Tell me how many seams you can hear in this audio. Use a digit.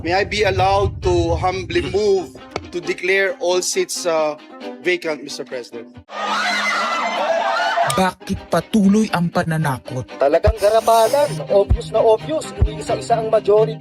1